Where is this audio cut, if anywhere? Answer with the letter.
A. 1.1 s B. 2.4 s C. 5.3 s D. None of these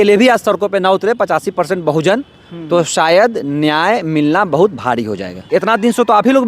C